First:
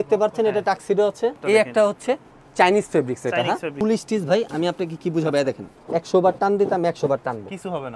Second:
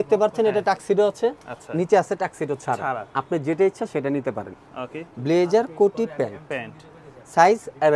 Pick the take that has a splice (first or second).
first